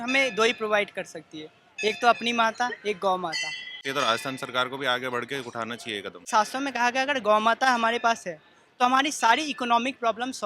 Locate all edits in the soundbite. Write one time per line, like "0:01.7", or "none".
0:03.8
0:06.3